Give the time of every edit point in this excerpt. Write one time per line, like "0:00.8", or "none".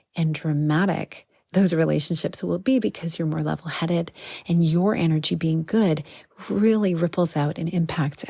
none